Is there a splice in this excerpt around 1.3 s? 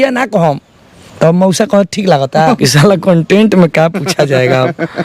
no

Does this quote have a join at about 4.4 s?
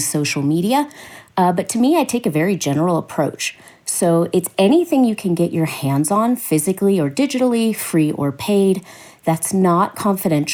no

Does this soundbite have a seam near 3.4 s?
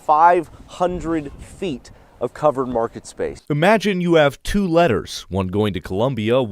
yes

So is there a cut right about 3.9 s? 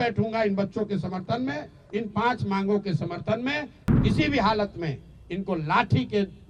yes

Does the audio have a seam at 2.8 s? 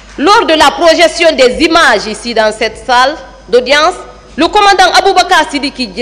no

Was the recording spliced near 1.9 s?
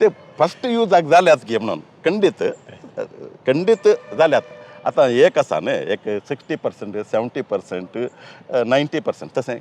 no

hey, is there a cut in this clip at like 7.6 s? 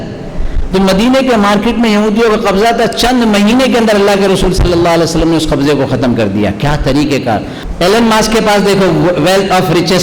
yes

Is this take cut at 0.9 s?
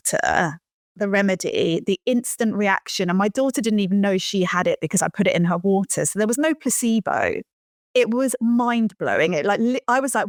no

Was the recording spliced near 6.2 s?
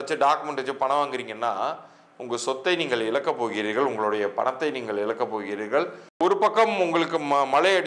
yes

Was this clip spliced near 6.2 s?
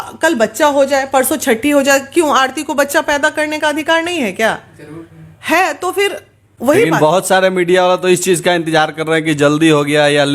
no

